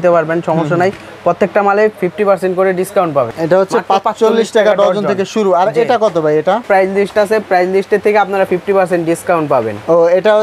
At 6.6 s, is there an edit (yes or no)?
yes